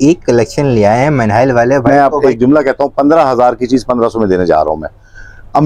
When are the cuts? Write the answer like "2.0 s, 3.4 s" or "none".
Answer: 1.9 s